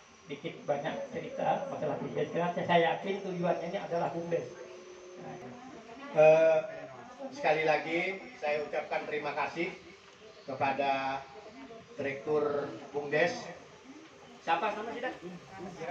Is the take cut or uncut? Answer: cut